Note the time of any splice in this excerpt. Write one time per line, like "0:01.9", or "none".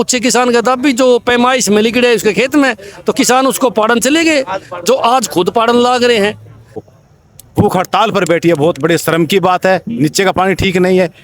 0:06.8